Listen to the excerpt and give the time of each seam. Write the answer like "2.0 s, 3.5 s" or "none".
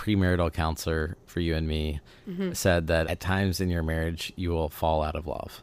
none